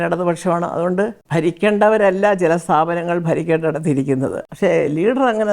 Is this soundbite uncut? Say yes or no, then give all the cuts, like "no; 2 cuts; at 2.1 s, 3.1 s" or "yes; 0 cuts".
no; 2 cuts; at 1.2 s, 4.4 s